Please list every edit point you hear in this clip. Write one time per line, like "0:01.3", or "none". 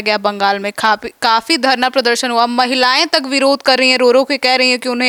none